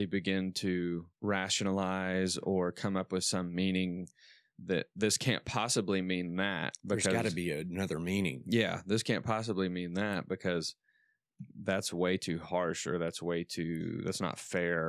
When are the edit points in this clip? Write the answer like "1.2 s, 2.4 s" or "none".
1.1 s